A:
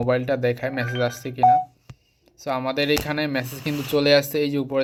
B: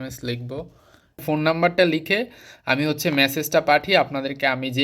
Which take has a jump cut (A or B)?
B